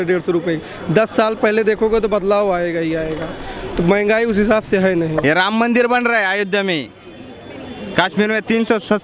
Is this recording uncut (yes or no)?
no